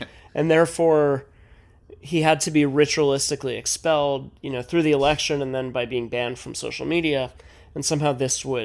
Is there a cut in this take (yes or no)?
no